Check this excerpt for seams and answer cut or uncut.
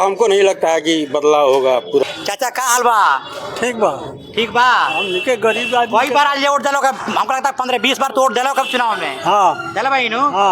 cut